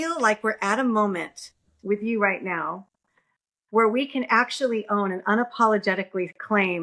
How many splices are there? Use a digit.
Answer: 0